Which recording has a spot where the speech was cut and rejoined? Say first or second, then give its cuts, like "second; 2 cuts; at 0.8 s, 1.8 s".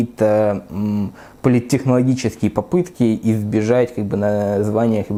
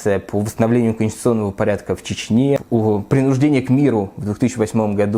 second; 1 cut; at 2.6 s